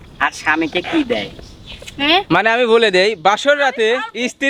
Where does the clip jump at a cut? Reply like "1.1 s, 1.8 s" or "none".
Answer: none